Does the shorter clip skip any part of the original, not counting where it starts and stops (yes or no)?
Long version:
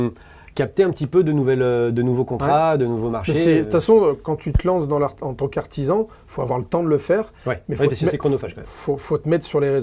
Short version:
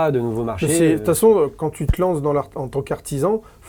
no